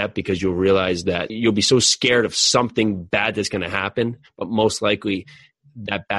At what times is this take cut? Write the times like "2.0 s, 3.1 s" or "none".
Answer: none